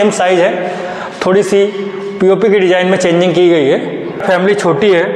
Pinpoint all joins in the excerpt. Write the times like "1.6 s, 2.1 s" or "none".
4.2 s